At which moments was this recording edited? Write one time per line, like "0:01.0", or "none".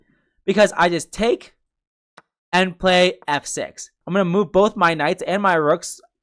0:04.0